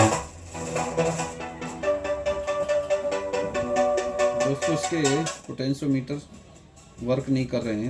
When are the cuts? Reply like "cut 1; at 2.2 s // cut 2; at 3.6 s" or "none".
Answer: none